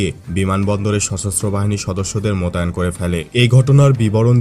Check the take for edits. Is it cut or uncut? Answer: cut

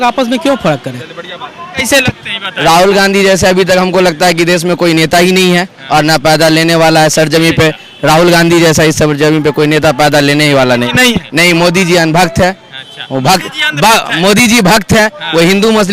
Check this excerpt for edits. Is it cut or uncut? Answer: cut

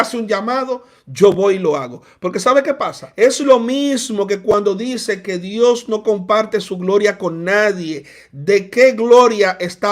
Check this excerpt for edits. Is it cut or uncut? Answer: cut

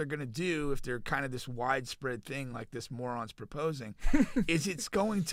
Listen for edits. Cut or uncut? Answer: uncut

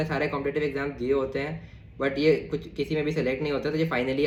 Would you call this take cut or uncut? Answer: uncut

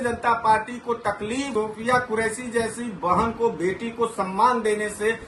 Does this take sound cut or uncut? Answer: uncut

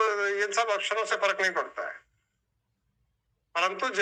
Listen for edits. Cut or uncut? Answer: uncut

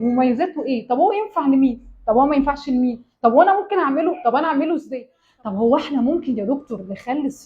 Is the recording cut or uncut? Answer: cut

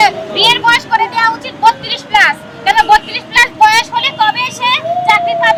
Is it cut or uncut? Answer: uncut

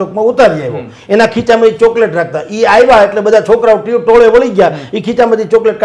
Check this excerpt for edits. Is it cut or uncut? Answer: uncut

